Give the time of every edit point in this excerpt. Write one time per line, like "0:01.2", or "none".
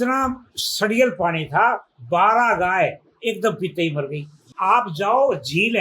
0:04.4